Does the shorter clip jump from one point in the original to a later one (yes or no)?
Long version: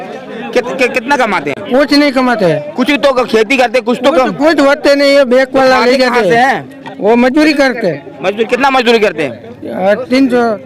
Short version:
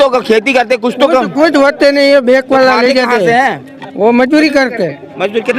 no